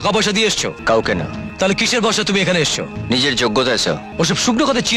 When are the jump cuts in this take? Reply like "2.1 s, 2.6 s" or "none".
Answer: 0.8 s, 1.4 s, 2.9 s, 4.1 s